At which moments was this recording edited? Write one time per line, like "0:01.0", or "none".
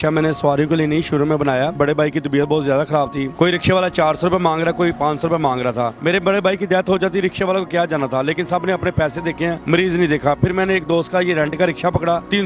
0:01.8
0:03.3
0:06.0
0:10.4